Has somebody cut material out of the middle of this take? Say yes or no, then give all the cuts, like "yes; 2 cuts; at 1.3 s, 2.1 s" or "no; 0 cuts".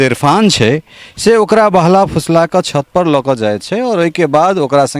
no; 0 cuts